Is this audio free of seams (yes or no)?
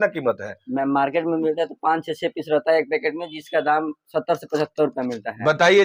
yes